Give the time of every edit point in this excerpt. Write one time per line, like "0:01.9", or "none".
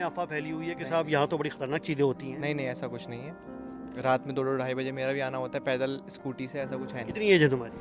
none